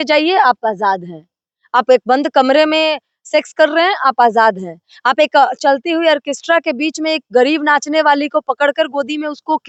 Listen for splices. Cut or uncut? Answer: uncut